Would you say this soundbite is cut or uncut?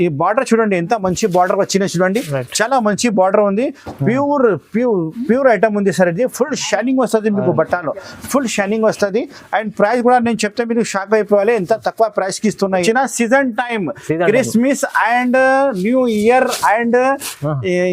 cut